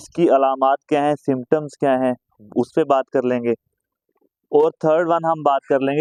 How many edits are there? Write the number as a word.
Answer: zero